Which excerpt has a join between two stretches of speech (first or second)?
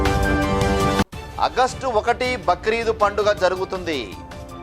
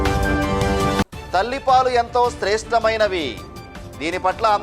first